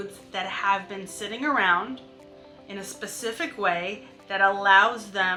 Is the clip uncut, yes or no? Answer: yes